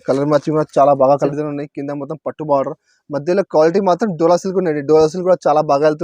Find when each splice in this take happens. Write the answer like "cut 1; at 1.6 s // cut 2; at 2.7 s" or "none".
cut 1; at 1.3 s